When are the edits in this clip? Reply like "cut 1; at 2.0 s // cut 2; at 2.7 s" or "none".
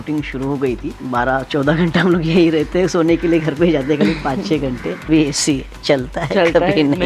cut 1; at 0.9 s // cut 2; at 5.1 s